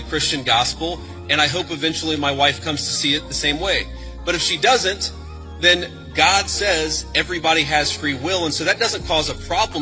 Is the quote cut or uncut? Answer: uncut